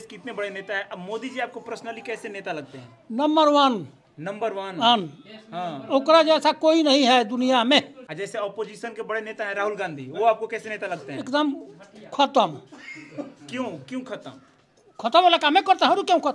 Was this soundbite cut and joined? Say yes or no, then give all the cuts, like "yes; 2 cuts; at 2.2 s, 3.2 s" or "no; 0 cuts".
yes; 1 cut; at 8.0 s